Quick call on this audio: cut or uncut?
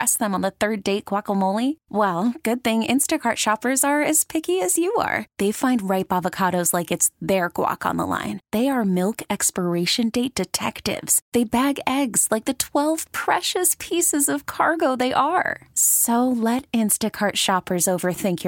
uncut